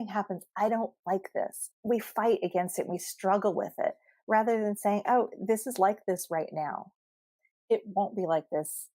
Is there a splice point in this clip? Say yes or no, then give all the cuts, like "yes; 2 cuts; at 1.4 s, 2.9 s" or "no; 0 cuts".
yes; 1 cut; at 1.7 s